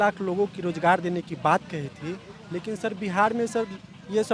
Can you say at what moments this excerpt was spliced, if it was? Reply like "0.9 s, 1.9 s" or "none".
none